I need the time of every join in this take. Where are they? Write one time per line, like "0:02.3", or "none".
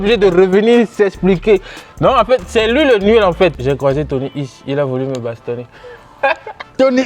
0:03.6